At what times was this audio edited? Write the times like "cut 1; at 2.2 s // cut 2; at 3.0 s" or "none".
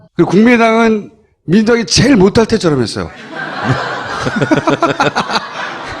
cut 1; at 1.8 s